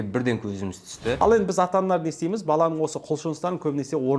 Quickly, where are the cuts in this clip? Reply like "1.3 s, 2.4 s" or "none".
1.2 s

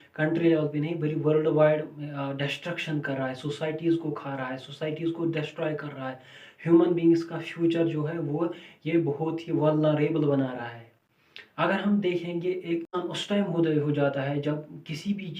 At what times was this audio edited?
12.9 s

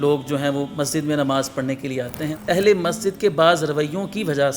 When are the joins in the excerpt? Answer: 2.3 s

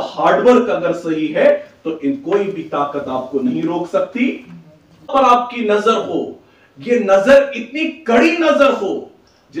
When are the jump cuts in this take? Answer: 5.1 s

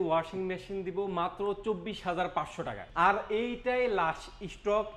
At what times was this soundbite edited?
2.8 s

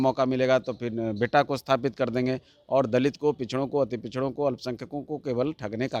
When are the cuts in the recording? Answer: none

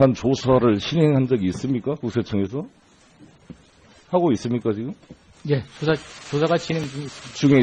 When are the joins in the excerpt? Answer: none

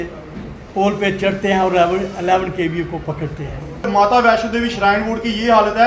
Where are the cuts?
3.9 s

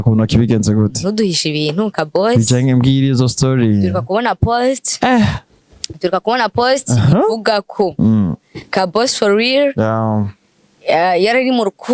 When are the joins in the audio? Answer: none

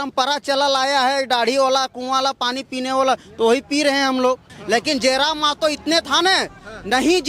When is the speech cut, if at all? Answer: 4.5 s

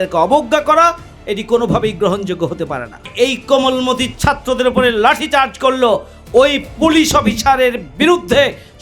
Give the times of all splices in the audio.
3.1 s

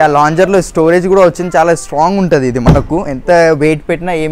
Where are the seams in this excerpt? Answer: none

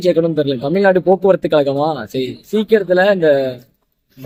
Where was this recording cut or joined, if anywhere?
none

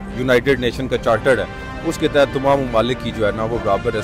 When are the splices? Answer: none

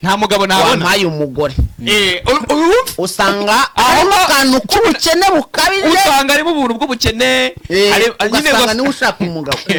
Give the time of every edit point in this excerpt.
none

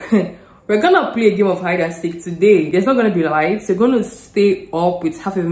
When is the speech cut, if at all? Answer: none

